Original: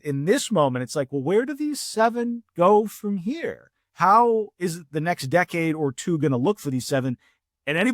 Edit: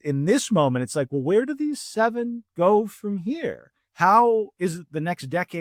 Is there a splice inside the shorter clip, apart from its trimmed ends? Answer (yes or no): no